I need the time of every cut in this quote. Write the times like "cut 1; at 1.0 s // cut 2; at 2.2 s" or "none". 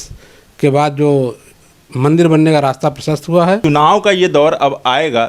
cut 1; at 3.6 s